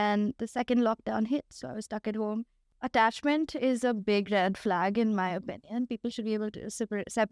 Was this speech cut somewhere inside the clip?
yes; 1 cut; at 2.6 s

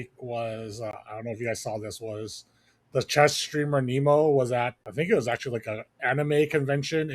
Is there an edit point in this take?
yes; 2 cuts; at 0.9 s, 4.8 s

